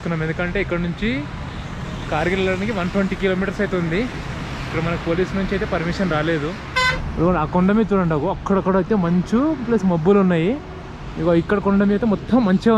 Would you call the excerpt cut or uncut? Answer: cut